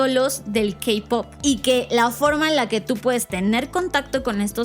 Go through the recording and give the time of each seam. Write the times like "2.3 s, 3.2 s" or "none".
1.3 s